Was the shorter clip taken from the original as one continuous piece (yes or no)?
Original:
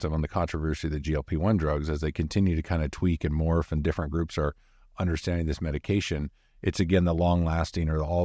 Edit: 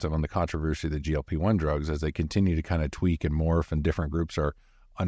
yes